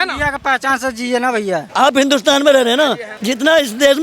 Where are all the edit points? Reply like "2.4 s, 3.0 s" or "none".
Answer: 1.7 s, 3.1 s